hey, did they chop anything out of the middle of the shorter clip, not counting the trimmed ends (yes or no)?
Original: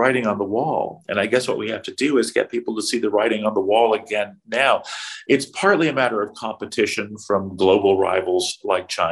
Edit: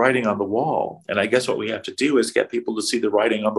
no